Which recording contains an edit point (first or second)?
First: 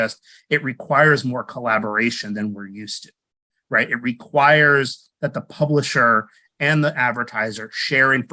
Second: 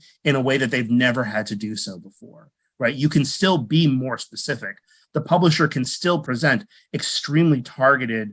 second